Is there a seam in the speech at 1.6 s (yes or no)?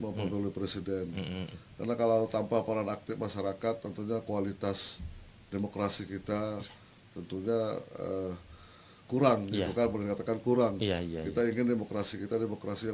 no